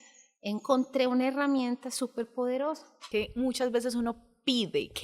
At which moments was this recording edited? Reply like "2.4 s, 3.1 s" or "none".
3.0 s